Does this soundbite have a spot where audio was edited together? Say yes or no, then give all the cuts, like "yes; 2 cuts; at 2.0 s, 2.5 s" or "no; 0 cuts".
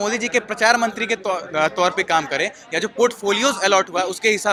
no; 0 cuts